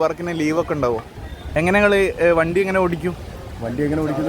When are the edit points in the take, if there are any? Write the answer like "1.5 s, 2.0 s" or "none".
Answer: 1.4 s